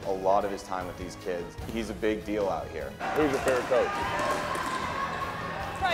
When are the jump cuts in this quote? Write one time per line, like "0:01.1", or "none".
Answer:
0:01.6
0:02.9